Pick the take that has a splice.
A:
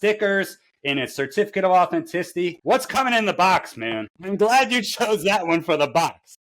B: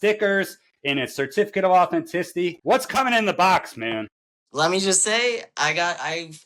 A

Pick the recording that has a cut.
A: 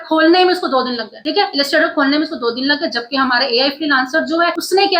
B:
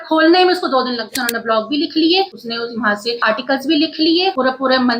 B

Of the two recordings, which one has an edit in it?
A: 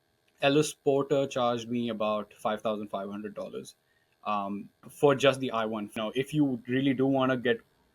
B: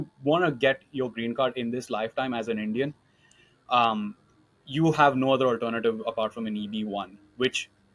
A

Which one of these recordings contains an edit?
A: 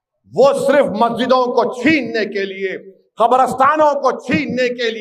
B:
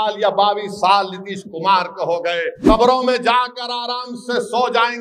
B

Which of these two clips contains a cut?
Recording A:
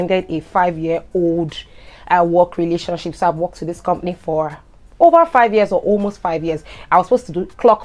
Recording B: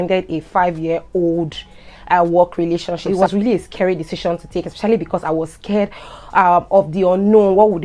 B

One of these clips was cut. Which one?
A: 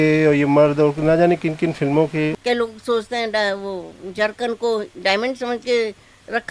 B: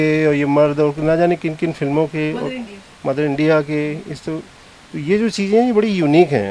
A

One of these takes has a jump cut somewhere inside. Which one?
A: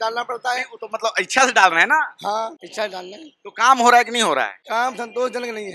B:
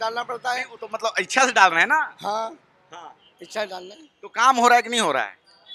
A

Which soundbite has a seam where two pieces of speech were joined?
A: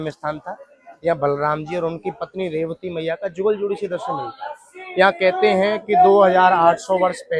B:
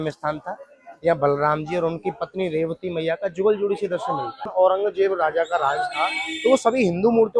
B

